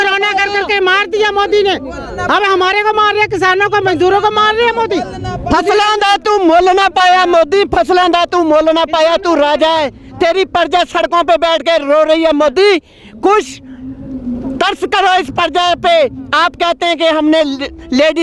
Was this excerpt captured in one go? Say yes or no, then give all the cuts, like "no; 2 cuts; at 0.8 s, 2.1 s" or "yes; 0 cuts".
yes; 0 cuts